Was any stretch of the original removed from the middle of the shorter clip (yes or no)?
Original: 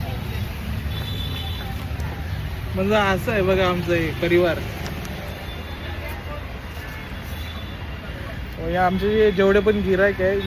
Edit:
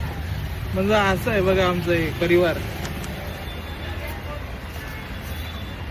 no